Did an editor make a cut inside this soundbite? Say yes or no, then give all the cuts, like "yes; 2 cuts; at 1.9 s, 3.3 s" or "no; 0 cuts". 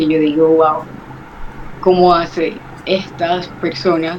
no; 0 cuts